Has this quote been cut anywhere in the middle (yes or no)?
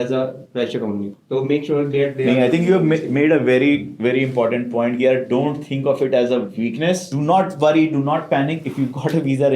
yes